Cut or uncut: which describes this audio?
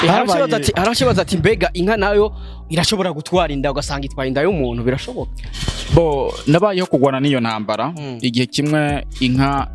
uncut